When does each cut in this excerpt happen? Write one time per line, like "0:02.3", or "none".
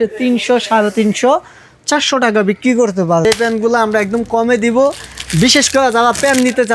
0:03.2